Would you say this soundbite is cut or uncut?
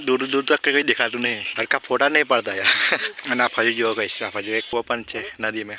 cut